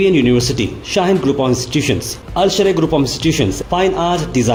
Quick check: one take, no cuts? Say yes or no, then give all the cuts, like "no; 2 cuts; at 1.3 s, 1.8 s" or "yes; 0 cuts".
yes; 0 cuts